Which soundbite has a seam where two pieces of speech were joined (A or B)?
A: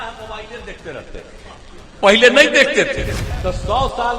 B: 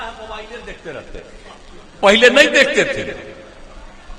A